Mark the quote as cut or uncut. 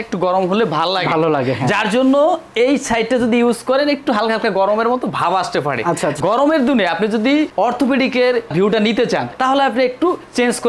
uncut